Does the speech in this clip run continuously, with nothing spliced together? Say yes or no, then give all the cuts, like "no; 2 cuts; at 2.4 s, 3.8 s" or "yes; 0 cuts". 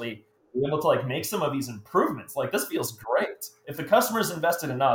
no; 1 cut; at 3.6 s